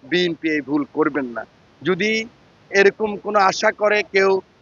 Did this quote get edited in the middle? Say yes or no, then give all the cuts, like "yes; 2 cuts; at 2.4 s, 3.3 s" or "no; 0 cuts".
no; 0 cuts